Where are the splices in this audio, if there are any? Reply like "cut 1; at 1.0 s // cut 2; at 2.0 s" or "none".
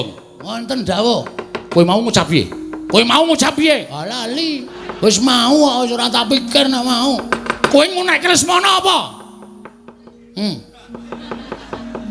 cut 1; at 1.6 s // cut 2; at 4.8 s // cut 3; at 7.5 s